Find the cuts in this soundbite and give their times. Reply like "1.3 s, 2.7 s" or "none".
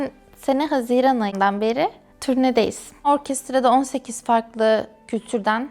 2.1 s, 3.1 s